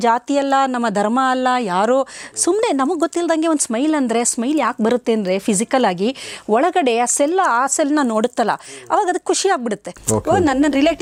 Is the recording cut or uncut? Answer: uncut